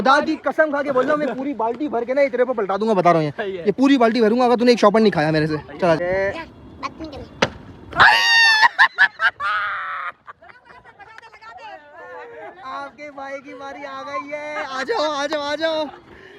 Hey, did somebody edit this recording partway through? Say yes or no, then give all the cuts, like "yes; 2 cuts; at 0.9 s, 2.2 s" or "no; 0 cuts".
yes; 1 cut; at 6.0 s